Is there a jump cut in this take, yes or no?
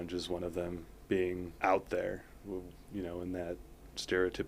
yes